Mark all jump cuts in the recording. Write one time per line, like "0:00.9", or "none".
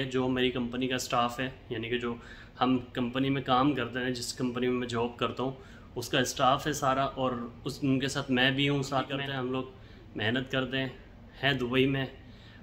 0:09.2

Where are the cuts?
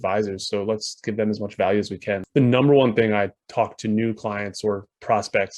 0:02.2

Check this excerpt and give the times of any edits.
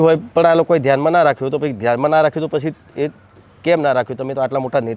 none

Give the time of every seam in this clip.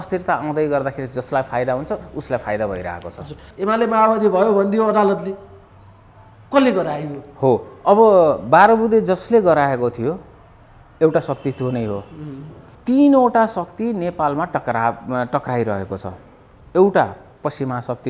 0:03.4
0:12.7

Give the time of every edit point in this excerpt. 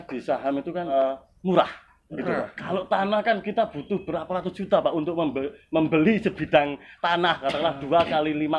0:00.9

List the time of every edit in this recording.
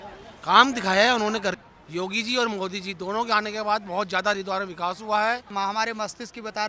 0:01.6
0:05.5

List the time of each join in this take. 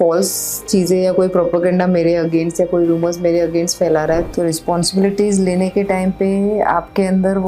0:04.3

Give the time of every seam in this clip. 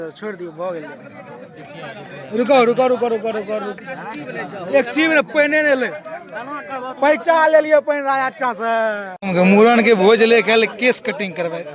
0:03.7
0:09.1

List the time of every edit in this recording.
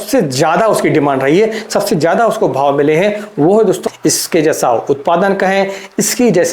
0:03.8

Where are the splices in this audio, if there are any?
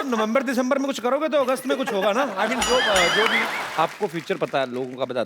0:03.6

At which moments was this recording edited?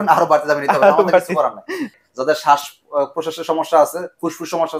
0:01.9

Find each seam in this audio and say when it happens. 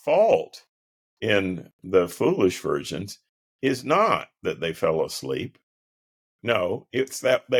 none

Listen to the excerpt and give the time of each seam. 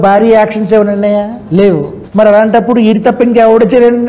0:02.0

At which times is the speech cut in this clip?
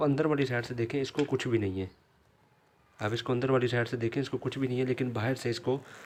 none

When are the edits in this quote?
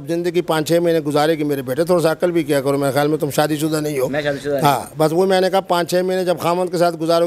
none

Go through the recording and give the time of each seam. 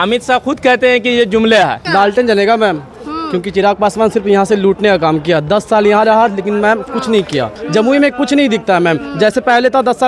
0:01.8
0:07.6

